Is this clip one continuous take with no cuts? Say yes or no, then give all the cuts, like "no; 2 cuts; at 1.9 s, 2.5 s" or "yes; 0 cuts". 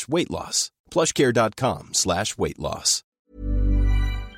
no; 1 cut; at 3.2 s